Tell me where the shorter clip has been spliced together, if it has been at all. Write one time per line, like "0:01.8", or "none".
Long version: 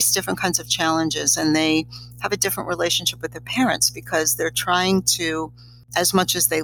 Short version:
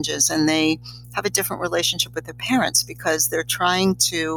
none